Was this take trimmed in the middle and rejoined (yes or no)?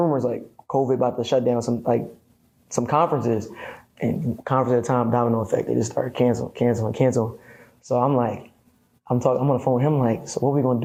no